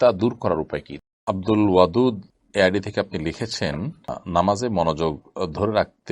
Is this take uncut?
no; 3 cuts; at 1.2 s, 2.3 s, 4.2 s

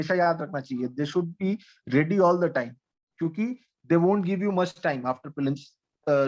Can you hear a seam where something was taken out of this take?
no; 0 cuts

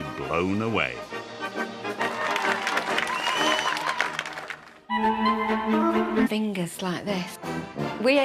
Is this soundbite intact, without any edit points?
yes; 0 cuts

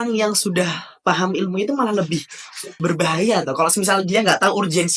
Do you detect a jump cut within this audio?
no; 0 cuts

